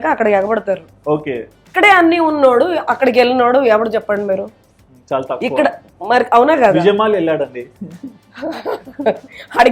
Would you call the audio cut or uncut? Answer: cut